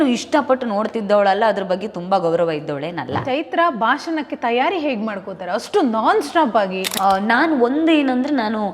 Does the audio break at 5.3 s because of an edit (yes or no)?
no